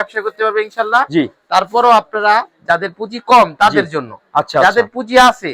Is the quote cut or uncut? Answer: uncut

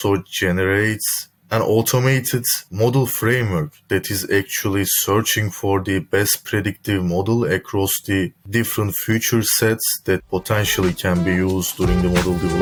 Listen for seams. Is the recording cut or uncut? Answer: uncut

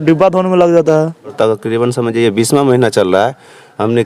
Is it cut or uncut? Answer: cut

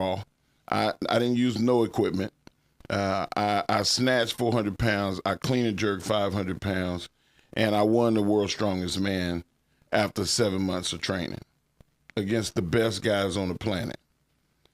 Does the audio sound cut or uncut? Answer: uncut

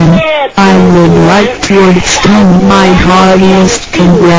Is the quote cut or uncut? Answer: uncut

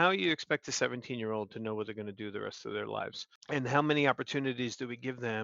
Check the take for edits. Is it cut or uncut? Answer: cut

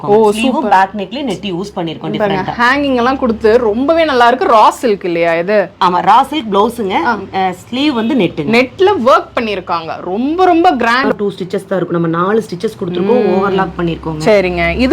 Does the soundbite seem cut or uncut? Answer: cut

